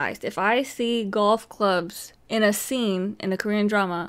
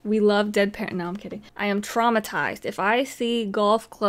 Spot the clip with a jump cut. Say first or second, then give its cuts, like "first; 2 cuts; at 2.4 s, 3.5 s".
second; 1 cut; at 1.5 s